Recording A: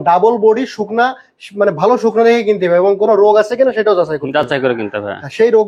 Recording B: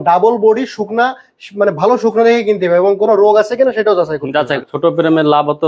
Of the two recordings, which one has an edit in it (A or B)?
B